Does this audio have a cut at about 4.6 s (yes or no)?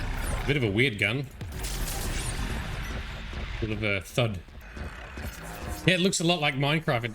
yes